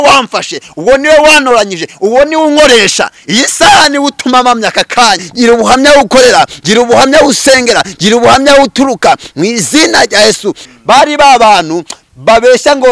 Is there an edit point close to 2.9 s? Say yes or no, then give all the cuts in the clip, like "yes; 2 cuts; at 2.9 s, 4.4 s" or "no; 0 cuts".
no; 2 cuts; at 5.3 s, 10.6 s